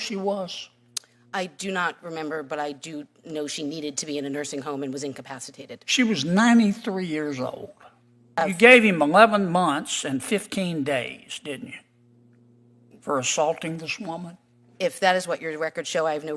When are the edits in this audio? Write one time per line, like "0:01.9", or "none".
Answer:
0:08.4